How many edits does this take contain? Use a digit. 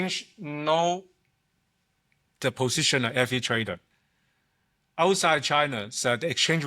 0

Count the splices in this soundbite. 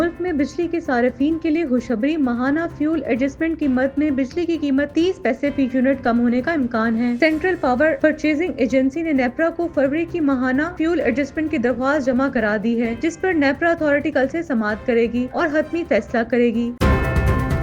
1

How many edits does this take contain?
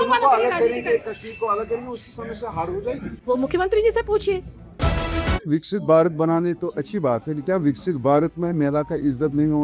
1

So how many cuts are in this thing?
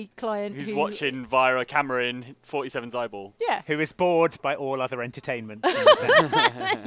1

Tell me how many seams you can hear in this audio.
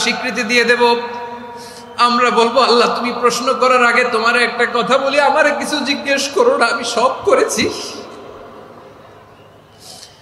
0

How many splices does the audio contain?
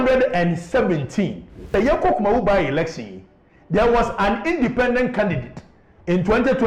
1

